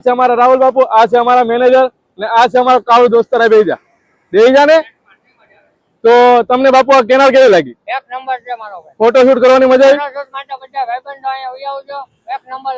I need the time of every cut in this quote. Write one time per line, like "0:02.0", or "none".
none